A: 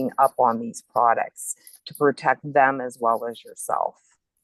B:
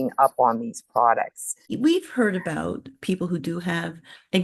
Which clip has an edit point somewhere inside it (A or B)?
B